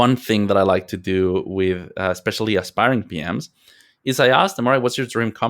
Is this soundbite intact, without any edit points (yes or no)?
yes